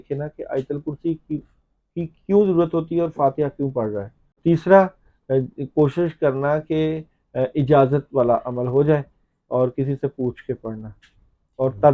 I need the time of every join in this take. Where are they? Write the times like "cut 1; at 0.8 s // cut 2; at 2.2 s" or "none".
cut 1; at 4.4 s